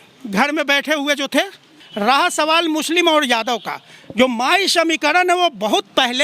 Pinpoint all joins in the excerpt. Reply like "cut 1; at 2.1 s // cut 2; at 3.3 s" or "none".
cut 1; at 1.7 s